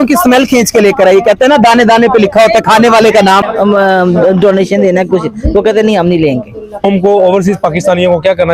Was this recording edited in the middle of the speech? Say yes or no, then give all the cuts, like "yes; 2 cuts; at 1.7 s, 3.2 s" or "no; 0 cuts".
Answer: yes; 2 cuts; at 3.5 s, 6.8 s